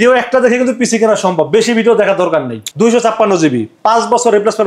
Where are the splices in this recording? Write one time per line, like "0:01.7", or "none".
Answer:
0:02.6